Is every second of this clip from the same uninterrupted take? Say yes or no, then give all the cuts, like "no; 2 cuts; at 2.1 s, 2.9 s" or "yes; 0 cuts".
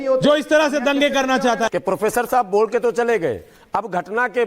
no; 1 cut; at 1.7 s